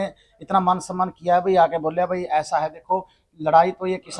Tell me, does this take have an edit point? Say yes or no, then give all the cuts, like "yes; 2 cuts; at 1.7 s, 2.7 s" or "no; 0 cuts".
no; 0 cuts